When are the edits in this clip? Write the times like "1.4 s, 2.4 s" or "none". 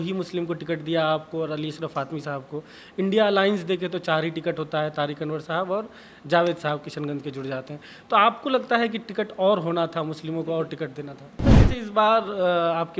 11.3 s